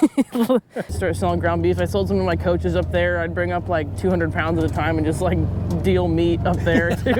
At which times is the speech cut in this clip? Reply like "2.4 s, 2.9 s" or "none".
0.9 s